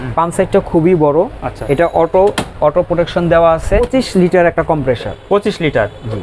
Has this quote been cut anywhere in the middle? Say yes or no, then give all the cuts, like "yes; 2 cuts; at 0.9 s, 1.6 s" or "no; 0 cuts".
yes; 1 cut; at 3.8 s